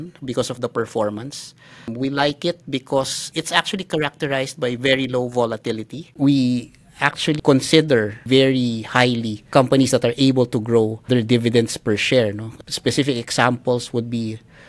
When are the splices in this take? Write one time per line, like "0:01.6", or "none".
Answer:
0:06.1
0:08.2
0:12.5